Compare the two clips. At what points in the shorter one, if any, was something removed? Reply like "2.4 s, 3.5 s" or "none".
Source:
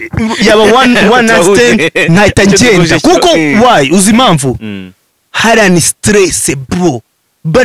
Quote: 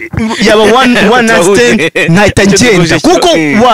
none

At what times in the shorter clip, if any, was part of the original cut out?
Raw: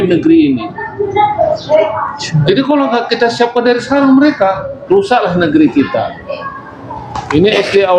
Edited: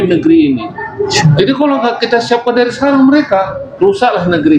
1.1 s

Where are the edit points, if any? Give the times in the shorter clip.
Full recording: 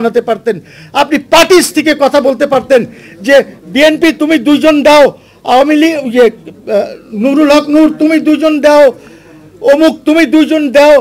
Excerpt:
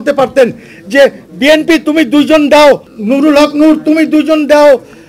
2.9 s

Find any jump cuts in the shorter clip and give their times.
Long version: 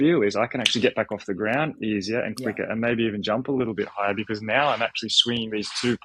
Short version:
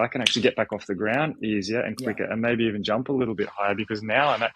none

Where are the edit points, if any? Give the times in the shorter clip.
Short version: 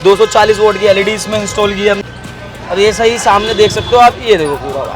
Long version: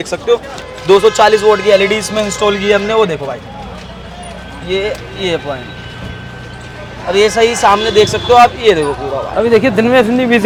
2.0 s

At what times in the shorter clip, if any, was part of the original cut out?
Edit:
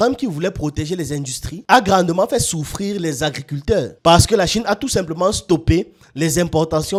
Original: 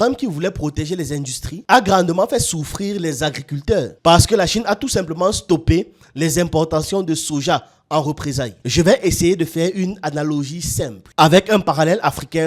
none

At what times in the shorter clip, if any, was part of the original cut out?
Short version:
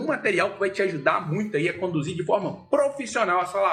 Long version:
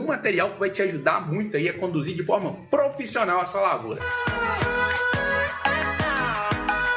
none

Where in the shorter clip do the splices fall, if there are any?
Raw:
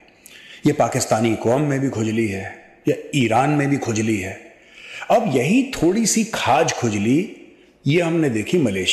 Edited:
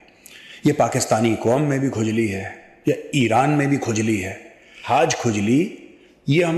4.8 s

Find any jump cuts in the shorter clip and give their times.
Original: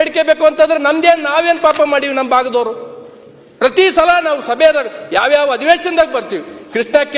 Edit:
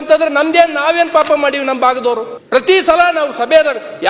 2.3 s

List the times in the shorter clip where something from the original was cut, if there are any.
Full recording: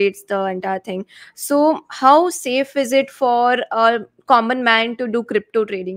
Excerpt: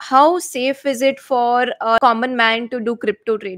2.0 s

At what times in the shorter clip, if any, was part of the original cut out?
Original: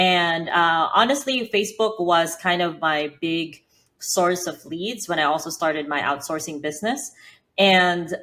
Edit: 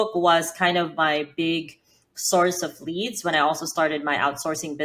none

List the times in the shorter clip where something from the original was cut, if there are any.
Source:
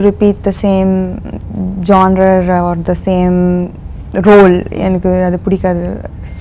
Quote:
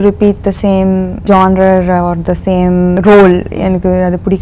1.1 s, 2.9 s

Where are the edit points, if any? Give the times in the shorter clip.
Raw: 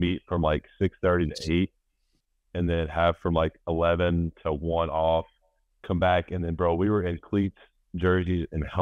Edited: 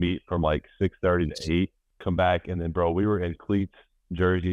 1.9 s

